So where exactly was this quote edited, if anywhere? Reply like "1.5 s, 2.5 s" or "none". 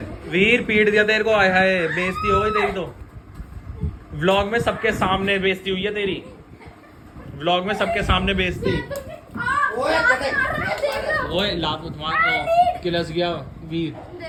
none